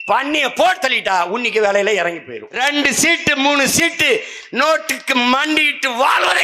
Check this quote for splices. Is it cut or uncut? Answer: cut